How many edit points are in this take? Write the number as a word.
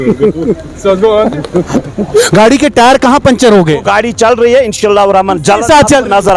one